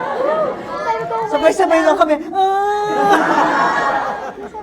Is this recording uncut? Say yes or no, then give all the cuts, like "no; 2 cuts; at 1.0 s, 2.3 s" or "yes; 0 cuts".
yes; 0 cuts